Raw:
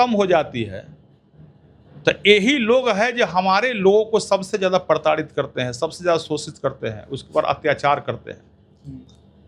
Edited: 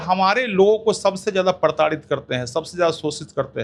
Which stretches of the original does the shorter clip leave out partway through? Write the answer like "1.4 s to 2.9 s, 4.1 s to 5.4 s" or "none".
none